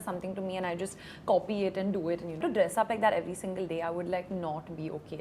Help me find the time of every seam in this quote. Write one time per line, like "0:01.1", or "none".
0:02.4